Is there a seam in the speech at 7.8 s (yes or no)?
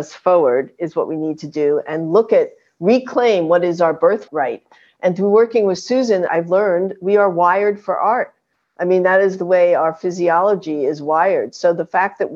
no